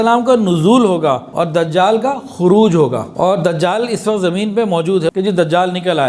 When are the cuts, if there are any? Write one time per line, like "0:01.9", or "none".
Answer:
0:01.3
0:03.1
0:05.1